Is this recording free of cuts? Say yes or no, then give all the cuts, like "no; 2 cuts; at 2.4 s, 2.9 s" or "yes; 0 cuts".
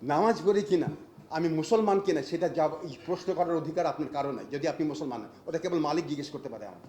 yes; 0 cuts